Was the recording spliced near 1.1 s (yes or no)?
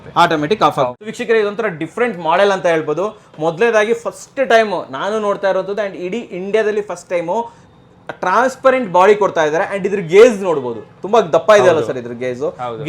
yes